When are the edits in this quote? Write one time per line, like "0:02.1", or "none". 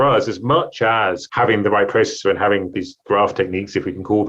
0:01.2
0:02.7